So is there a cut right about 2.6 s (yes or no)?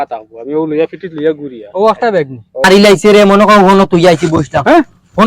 yes